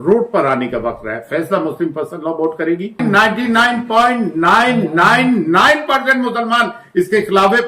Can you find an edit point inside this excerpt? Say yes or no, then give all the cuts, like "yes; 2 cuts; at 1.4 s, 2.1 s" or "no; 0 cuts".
yes; 1 cut; at 3.0 s